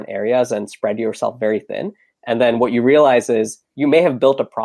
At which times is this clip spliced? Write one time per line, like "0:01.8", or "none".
0:03.7